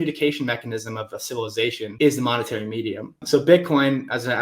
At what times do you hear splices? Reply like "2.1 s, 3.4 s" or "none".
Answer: 1.9 s, 3.2 s